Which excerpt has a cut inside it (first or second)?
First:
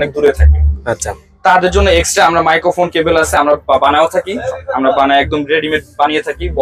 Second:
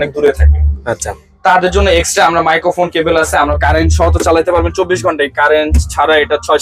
second